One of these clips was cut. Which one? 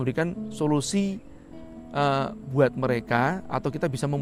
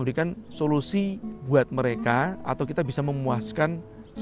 second; 1 cut; at 1.3 s

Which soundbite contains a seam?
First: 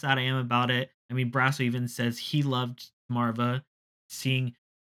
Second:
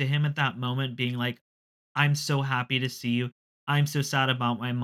first; 2 cuts; at 3.0 s, 4.0 s

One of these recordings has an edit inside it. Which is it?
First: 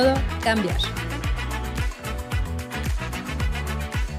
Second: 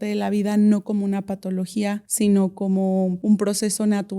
second; 2 cuts; at 2.1 s, 3.2 s

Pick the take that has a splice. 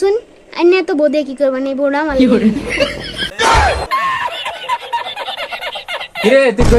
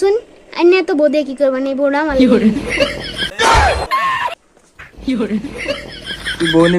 second; 1 cut; at 4.5 s

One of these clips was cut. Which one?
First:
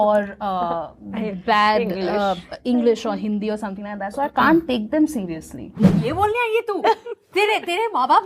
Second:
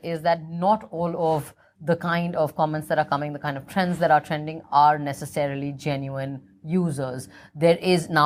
first; 1 cut; at 5.8 s

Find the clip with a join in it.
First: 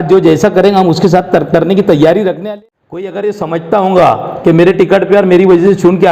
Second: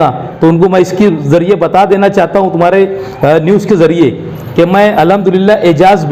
first; 1 cut; at 2.4 s

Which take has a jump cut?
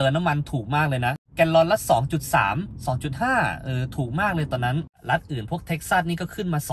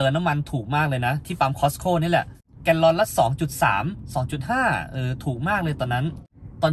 first; 2 cuts; at 1.2 s, 5.0 s

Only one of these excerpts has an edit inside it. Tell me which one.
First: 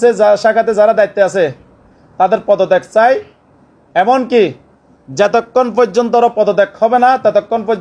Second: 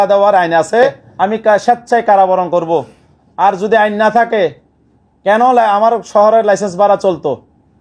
second; 1 cut; at 1.0 s

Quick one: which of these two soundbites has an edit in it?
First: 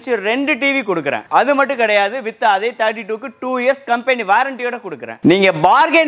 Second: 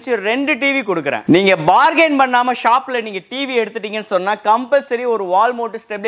second; 1 cut; at 1.2 s

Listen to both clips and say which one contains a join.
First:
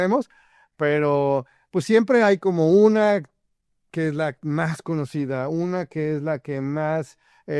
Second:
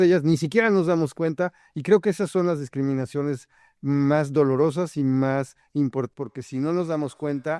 second; 1 cut; at 6.1 s

